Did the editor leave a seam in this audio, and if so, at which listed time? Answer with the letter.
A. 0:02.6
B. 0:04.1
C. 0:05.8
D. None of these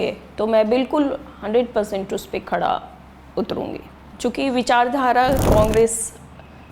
B